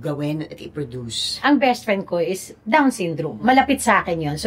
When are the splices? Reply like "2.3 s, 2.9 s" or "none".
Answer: 1.3 s, 3.4 s